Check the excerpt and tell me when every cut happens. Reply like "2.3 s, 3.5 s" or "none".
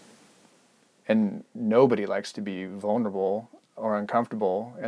none